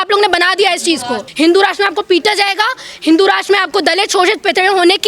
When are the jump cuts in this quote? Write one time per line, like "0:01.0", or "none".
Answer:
0:01.3